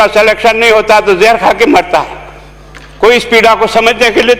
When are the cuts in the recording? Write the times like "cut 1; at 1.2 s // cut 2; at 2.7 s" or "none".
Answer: none